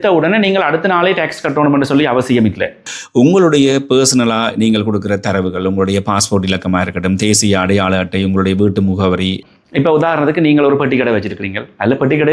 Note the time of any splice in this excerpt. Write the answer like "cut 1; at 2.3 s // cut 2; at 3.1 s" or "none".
cut 1; at 3.0 s // cut 2; at 9.4 s